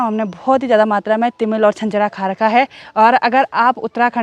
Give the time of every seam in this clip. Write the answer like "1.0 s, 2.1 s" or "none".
none